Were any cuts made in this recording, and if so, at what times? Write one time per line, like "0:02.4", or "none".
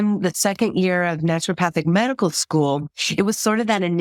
none